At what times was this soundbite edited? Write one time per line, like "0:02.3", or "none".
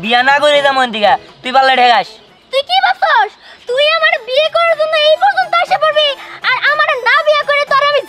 none